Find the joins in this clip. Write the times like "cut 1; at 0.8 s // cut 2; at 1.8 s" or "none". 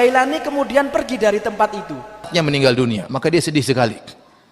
cut 1; at 2.3 s